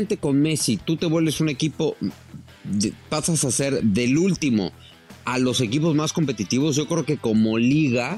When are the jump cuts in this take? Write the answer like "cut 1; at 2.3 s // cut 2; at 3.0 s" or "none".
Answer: none